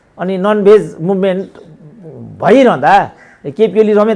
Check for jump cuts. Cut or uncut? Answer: uncut